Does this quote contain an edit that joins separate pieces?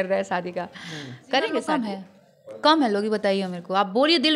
yes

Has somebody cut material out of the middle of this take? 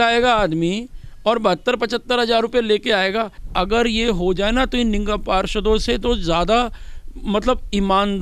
yes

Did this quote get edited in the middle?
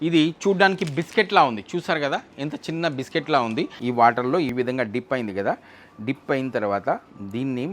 yes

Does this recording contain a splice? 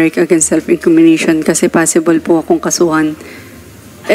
no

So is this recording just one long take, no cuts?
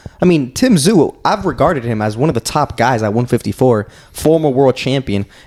yes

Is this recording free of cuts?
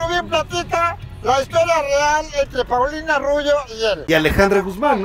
no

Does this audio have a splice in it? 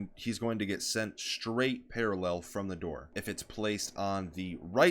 yes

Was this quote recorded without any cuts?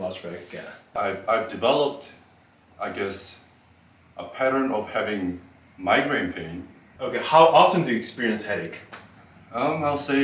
no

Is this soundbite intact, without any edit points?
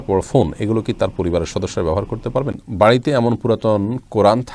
no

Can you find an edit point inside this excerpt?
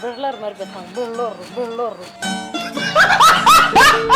yes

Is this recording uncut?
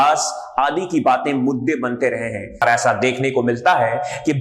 no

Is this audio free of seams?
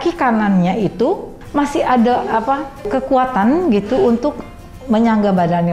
no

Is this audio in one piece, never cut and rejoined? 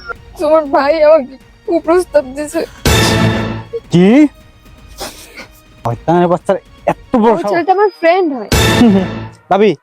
no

